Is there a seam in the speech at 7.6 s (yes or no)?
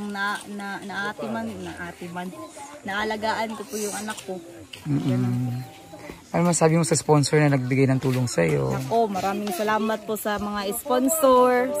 no